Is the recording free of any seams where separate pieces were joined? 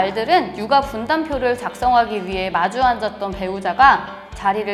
yes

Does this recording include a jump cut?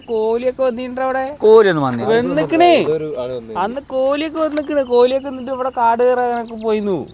no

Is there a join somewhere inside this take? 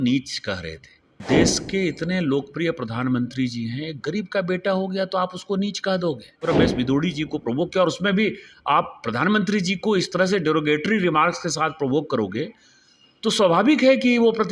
yes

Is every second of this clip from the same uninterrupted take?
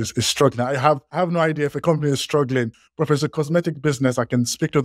no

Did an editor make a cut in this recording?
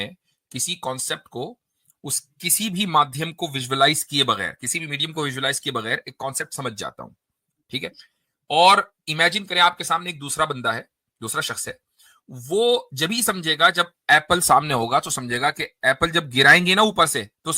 no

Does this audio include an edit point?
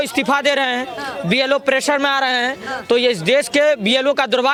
no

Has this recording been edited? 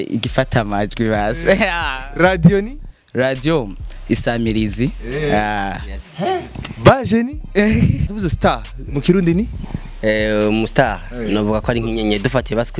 yes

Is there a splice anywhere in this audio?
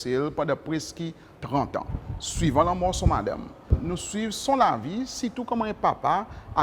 yes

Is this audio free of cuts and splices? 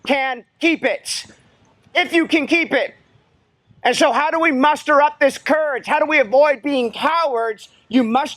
yes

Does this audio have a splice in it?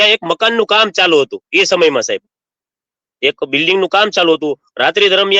no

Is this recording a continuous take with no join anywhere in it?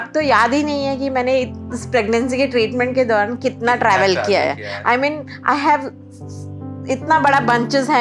yes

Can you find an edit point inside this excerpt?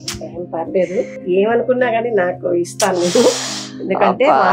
yes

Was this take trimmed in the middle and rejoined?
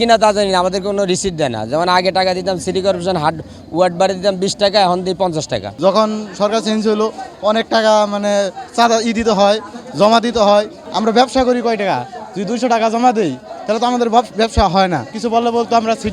yes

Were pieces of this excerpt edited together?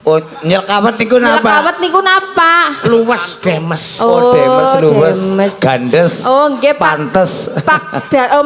no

